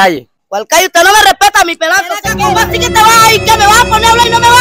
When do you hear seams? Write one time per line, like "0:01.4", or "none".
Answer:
0:02.3